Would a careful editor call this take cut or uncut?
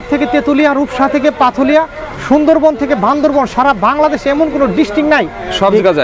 uncut